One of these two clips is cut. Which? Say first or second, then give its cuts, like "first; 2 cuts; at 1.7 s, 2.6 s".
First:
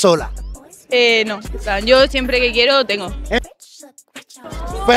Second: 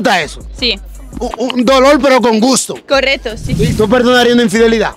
second; 1 cut; at 3.6 s